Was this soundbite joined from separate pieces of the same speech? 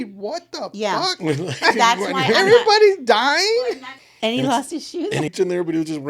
yes; 2 cuts; at 3.7 s, 5.3 s

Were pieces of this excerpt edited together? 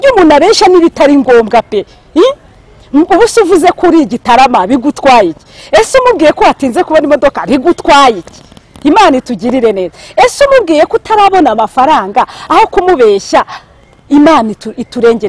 no; 0 cuts

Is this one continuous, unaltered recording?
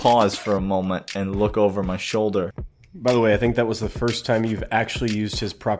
no; 1 cut; at 2.7 s

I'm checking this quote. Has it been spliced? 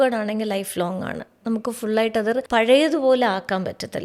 yes; 1 cut; at 2.5 s

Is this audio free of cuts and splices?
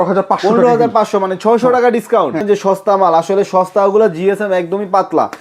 no; 1 cut; at 2.4 s

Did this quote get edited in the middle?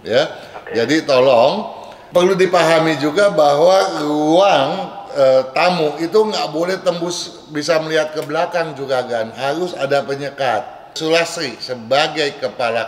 yes; 2 cuts; at 1.9 s, 10.9 s

